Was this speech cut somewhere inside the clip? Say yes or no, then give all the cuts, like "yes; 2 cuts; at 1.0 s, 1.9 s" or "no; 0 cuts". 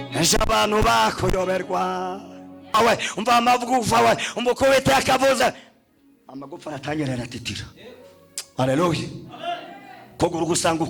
yes; 1 cut; at 2.7 s